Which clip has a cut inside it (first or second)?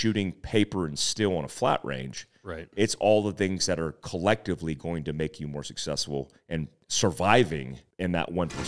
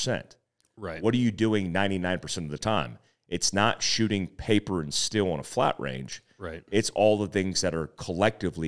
first